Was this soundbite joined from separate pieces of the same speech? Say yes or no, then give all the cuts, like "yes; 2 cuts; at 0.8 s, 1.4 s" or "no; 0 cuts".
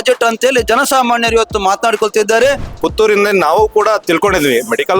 yes; 2 cuts; at 2.7 s, 4.0 s